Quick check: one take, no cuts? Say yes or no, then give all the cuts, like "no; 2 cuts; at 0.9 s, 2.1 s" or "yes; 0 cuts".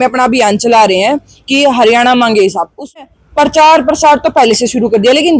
no; 1 cut; at 3.0 s